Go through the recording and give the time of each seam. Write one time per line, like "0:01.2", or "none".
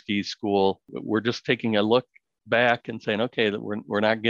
0:00.9